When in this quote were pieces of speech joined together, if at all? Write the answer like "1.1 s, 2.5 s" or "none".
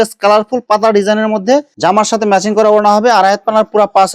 1.7 s